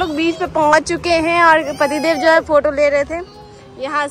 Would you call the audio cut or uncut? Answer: uncut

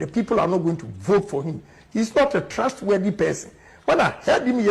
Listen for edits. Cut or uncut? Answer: uncut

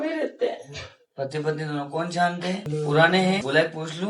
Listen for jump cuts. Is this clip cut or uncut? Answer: cut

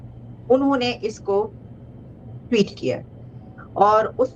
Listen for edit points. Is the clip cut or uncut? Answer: uncut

